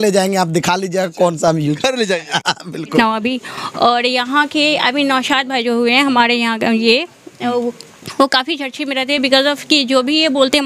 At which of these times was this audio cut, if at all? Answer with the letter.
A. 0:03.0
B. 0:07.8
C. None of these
A